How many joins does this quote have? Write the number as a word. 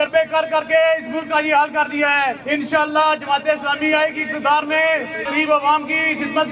two